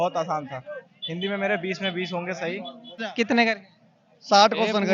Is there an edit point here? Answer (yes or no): yes